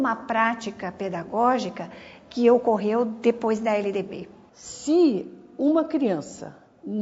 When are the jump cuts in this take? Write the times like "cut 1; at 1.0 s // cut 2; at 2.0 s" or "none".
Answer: none

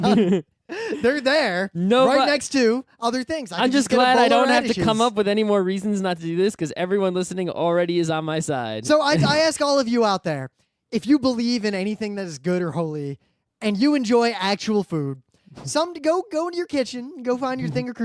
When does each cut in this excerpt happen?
cut 1; at 16.3 s

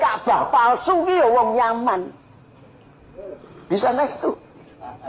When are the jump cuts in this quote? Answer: cut 1; at 3.7 s

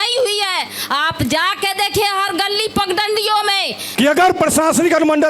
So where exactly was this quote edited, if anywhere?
cut 1; at 3.8 s

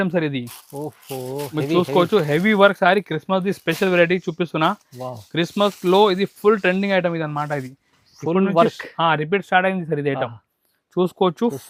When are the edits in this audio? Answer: none

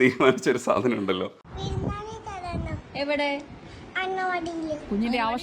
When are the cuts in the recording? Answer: cut 1; at 1.4 s

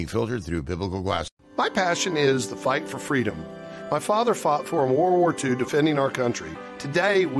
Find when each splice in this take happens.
cut 1; at 1.4 s

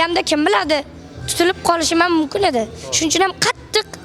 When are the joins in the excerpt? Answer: none

